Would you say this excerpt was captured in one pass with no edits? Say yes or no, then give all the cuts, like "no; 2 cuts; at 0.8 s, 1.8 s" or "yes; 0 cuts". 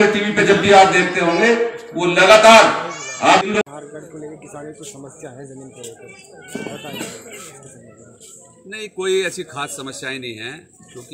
no; 1 cut; at 3.5 s